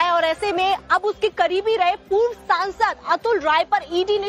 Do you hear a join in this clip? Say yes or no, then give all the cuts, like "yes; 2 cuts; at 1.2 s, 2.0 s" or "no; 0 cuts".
no; 0 cuts